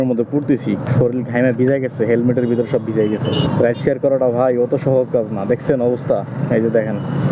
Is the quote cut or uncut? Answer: uncut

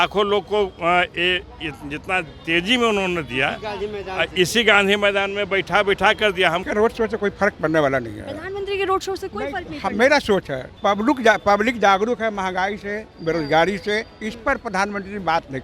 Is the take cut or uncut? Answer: cut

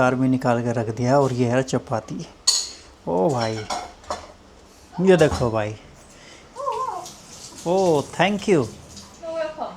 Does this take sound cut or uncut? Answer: uncut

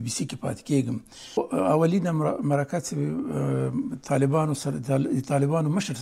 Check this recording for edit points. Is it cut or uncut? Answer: cut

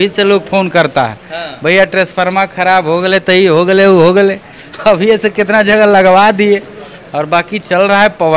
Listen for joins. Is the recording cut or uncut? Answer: uncut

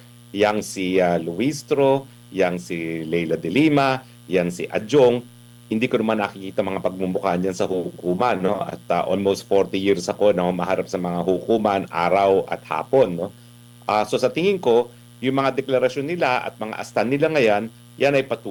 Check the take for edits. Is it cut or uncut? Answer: uncut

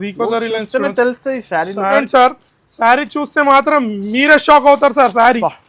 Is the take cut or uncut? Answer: cut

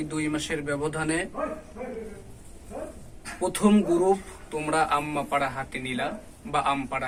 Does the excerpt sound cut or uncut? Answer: uncut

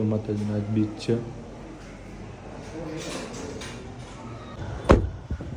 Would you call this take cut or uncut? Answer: cut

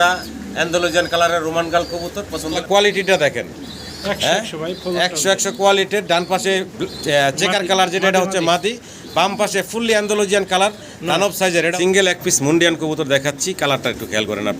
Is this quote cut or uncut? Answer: cut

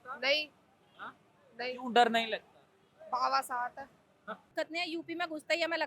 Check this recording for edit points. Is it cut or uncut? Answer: cut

